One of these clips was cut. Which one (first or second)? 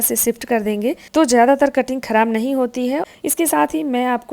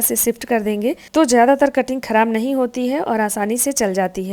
first